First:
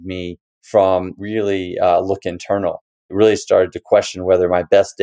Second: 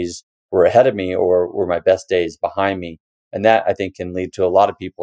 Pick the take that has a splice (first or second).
first